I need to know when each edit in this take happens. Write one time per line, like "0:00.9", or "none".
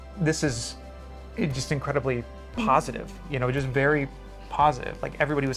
none

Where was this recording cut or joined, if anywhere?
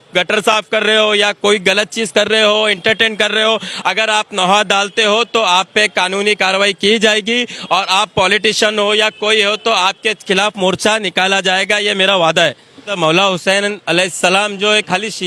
0:12.9

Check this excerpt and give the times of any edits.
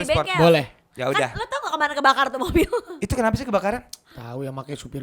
none

